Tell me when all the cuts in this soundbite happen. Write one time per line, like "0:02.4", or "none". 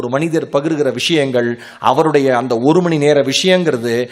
none

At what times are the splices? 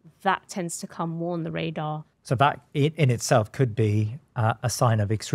0:02.1

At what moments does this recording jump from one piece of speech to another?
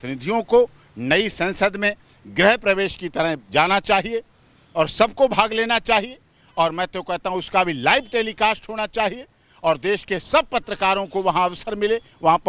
none

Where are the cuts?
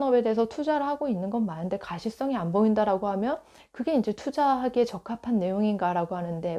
none

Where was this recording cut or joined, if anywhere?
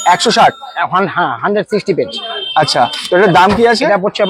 none

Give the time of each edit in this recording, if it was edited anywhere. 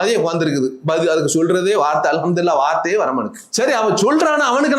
0:03.4

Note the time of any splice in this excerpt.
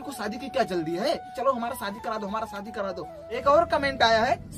0:01.3
0:03.2

